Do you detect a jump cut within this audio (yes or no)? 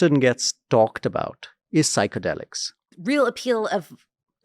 yes